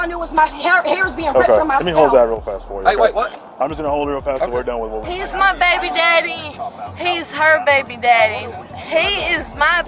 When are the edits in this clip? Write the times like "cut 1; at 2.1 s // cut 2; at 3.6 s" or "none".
cut 1; at 5.0 s